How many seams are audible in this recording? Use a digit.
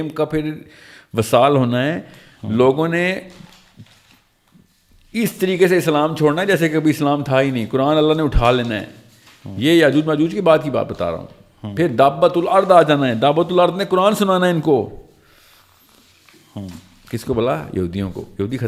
0